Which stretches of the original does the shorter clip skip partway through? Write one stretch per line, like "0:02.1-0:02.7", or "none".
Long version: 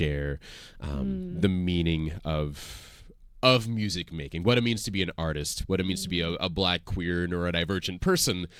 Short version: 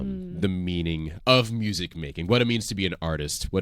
0:02.1-0:03.3